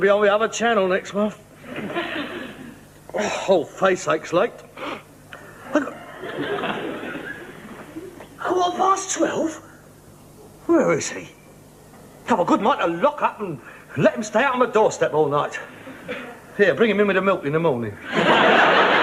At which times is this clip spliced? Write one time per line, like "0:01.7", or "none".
none